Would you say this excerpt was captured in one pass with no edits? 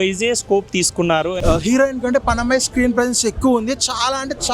no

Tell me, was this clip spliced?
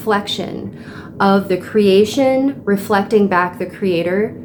no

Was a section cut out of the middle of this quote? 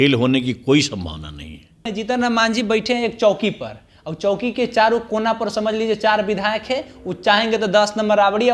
yes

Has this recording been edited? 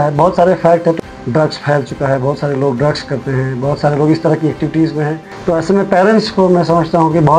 yes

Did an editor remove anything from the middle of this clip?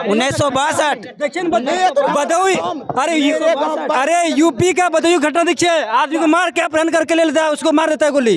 no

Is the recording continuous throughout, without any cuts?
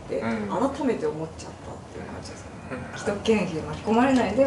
no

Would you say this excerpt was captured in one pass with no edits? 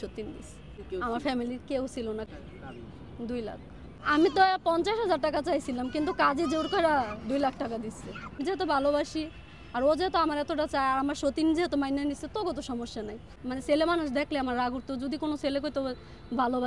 no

